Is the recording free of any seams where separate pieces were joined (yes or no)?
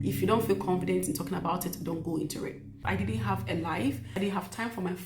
no